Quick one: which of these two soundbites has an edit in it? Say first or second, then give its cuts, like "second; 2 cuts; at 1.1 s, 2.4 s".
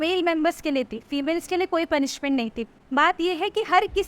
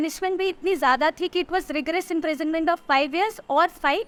first; 1 cut; at 2.8 s